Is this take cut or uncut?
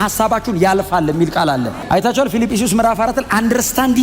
cut